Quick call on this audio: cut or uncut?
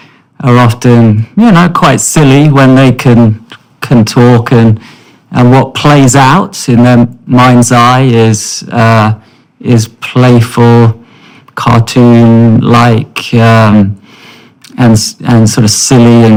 uncut